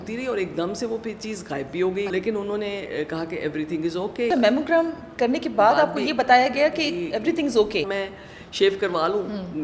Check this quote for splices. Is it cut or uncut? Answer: cut